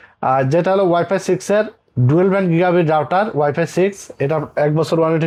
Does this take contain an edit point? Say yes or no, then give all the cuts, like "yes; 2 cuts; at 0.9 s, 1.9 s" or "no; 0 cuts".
no; 0 cuts